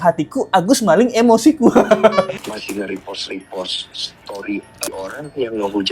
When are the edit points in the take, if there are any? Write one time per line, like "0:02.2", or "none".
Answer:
0:02.4
0:04.9